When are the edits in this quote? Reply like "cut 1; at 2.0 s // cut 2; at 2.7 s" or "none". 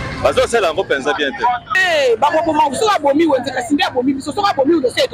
cut 1; at 1.7 s